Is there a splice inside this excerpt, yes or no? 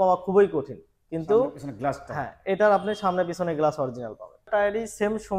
yes